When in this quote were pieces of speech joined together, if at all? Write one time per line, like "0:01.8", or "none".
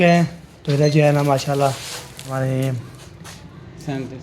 0:02.3